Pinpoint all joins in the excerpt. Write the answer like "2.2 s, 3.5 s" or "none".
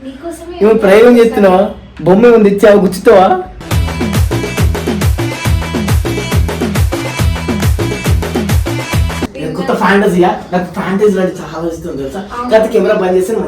9.3 s